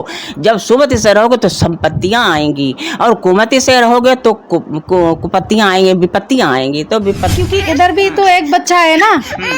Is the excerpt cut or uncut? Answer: cut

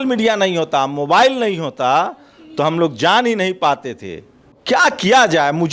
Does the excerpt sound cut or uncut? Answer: uncut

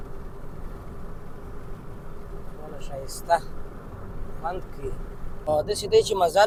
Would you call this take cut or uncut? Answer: uncut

